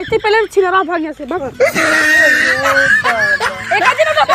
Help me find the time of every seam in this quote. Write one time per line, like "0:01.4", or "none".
none